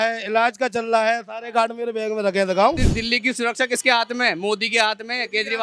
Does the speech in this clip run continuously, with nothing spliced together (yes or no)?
no